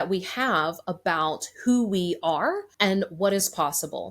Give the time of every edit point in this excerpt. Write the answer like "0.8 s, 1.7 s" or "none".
2.7 s